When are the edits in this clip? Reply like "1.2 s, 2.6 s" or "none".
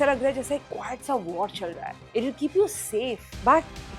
2.0 s